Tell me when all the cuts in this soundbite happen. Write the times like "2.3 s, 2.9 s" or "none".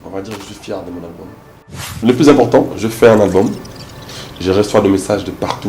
1.9 s

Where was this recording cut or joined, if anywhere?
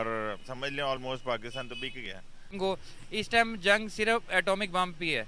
2.6 s

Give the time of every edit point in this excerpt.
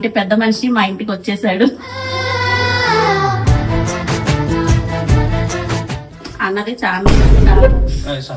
6.3 s

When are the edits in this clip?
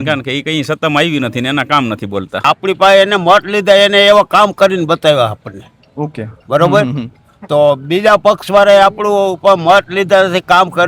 2.4 s

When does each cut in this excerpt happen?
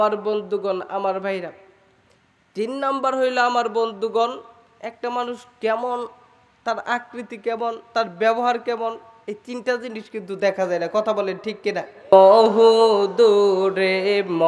12.1 s

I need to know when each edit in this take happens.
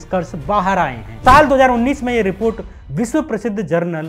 1.2 s

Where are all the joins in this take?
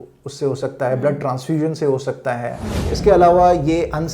2.9 s

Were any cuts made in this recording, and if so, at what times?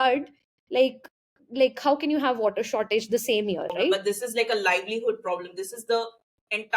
4.0 s

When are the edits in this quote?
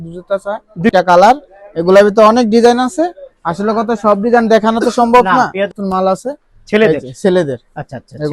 0.9 s, 5.7 s

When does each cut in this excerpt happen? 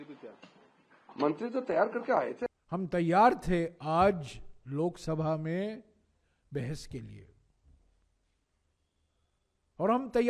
2.5 s

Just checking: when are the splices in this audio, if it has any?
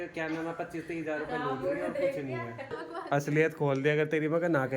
2.8 s

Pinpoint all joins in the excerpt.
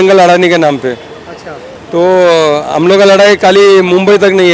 none

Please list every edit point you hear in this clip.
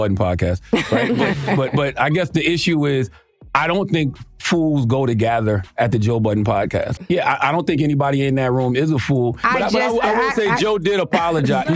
6.9 s, 9.4 s

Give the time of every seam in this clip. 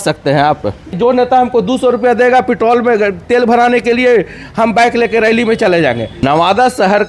0.9 s, 6.2 s

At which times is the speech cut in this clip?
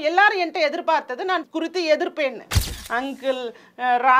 1.4 s, 2.7 s

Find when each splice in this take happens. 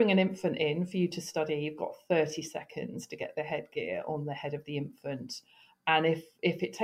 none

